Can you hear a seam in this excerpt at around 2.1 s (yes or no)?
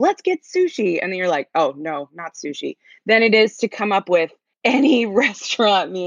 no